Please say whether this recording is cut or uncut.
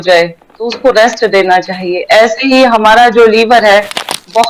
uncut